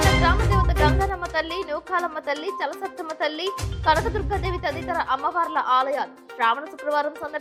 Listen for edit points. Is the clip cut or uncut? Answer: uncut